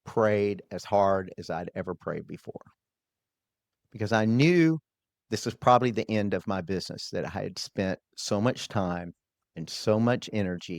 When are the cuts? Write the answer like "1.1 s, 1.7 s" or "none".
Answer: none

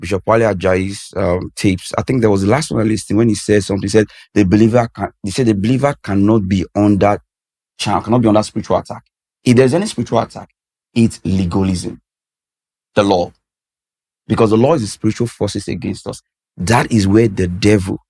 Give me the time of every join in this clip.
none

